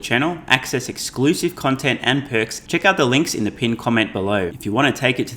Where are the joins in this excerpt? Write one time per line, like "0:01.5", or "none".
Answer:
0:02.6
0:04.5

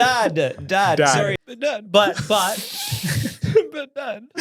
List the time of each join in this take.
0:01.4

